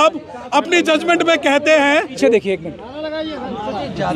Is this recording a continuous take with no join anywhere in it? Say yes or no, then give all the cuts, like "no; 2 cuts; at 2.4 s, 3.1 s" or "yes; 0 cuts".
no; 1 cut; at 2.2 s